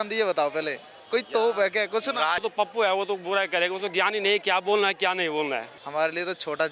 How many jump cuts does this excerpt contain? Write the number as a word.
two